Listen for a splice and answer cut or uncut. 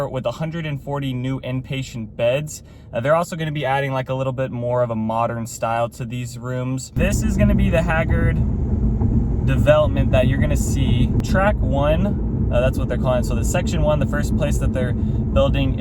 cut